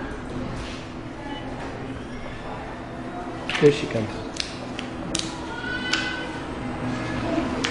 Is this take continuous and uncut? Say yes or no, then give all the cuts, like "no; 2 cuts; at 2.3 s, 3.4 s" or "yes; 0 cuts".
no; 1 cut; at 6.6 s